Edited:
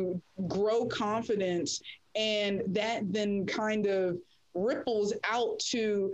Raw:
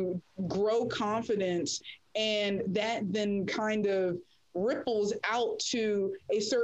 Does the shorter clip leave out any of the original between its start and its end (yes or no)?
no